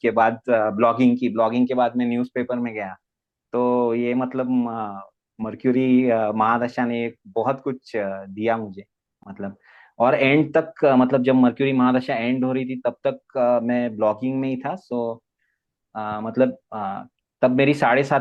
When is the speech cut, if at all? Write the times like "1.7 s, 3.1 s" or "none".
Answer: none